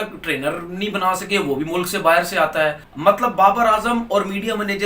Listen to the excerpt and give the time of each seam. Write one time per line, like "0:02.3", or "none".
0:02.9